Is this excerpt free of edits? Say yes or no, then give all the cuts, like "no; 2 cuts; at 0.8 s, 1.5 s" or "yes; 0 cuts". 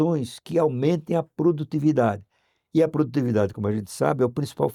yes; 0 cuts